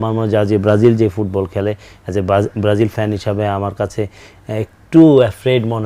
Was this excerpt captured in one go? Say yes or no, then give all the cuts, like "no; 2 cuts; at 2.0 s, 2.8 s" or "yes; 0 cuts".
yes; 0 cuts